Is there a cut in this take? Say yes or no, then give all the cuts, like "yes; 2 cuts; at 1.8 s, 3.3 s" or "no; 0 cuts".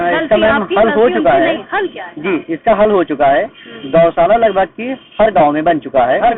no; 0 cuts